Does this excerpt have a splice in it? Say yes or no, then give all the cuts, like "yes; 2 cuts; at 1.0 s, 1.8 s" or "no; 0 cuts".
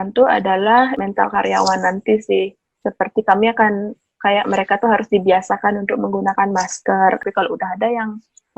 yes; 2 cuts; at 0.9 s, 7.2 s